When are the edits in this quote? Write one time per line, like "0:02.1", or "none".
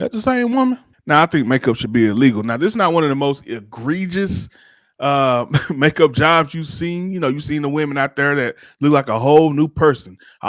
0:00.9

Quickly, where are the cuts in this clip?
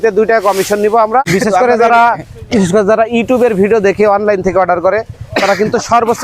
0:01.3

